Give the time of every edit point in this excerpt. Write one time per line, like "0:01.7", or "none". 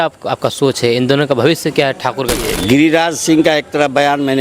0:02.4